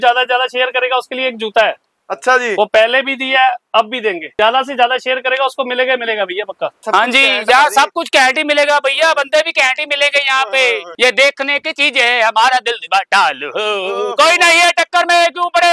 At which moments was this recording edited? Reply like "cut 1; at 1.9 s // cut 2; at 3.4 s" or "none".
cut 1; at 4.2 s // cut 2; at 6.8 s // cut 3; at 11.0 s